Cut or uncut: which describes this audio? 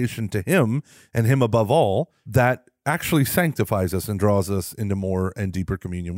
cut